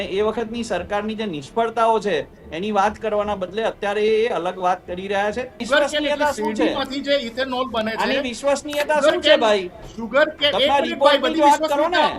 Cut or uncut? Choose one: cut